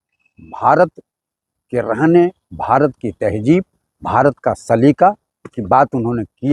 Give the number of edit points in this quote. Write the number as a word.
zero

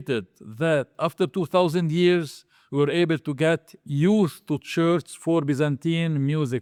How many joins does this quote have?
zero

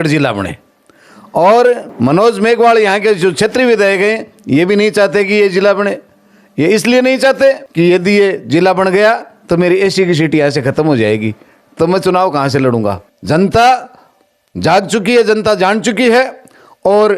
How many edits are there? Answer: three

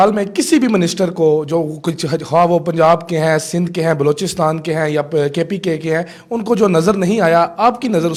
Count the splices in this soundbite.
zero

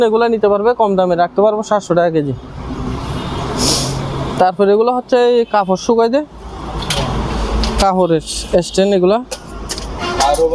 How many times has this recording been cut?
zero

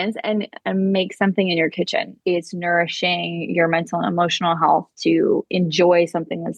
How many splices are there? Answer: one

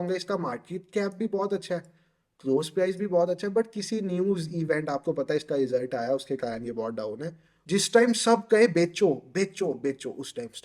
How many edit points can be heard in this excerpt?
one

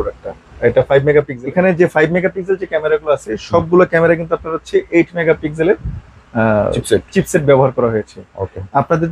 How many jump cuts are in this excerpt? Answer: one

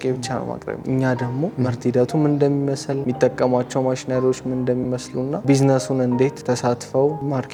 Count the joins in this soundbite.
zero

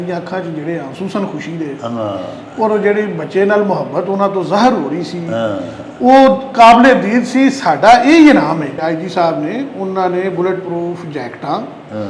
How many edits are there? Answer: one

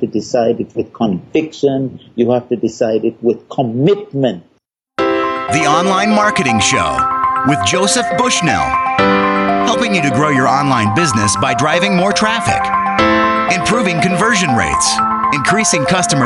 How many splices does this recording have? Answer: one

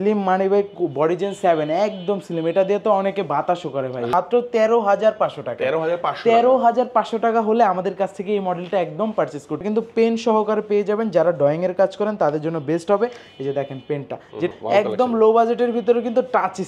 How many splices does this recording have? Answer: three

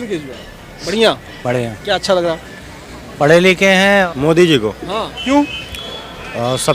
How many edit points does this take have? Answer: one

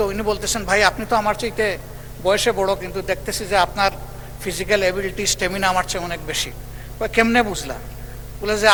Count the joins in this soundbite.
zero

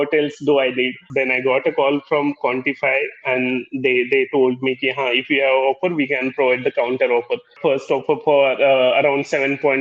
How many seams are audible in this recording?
two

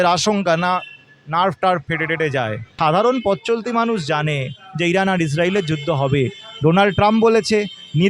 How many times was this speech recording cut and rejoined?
one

